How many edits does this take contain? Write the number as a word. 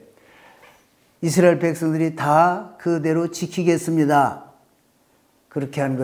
zero